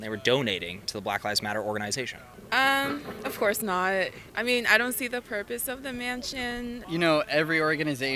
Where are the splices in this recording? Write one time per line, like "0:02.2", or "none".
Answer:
0:02.3
0:04.2
0:06.8